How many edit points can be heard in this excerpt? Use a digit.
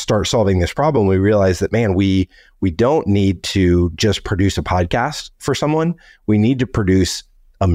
0